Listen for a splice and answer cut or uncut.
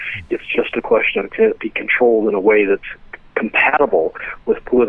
uncut